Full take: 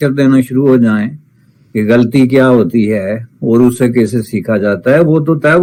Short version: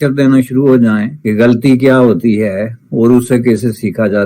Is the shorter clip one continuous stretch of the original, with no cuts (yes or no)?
no